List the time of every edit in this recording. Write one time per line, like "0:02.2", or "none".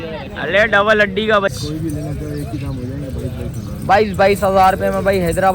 0:01.5